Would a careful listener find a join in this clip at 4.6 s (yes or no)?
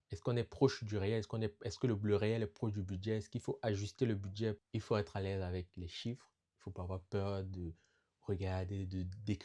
yes